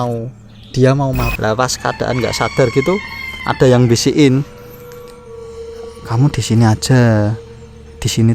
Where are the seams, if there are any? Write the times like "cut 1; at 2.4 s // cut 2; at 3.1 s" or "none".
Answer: cut 1; at 1.3 s